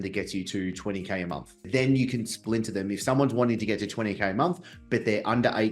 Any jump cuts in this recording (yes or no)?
yes